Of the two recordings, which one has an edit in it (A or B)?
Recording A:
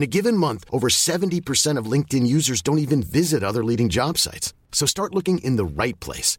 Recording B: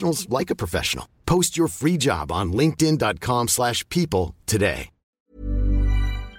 B